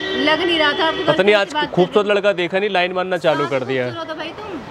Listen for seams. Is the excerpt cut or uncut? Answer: uncut